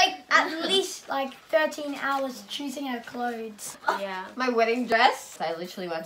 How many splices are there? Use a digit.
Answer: 2